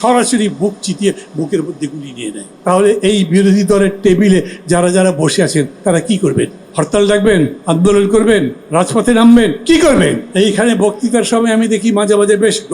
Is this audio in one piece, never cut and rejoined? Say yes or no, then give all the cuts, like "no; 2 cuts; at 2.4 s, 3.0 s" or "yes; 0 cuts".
no; 5 cuts; at 2.5 s, 6.6 s, 7.6 s, 8.6 s, 10.2 s